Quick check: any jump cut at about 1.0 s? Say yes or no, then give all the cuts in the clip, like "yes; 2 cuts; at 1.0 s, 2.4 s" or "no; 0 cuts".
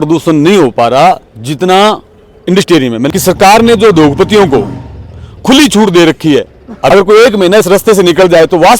no; 2 cuts; at 3.1 s, 6.7 s